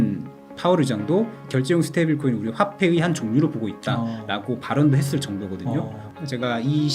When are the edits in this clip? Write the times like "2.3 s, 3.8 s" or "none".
1.5 s, 6.0 s

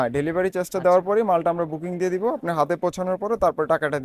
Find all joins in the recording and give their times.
none

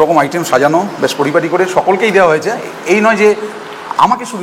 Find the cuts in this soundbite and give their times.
none

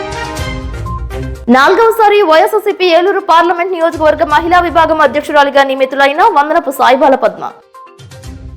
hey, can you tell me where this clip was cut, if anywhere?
1.2 s

